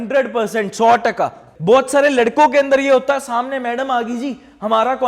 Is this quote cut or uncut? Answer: cut